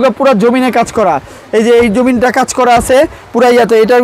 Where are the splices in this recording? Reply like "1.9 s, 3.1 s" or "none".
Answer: none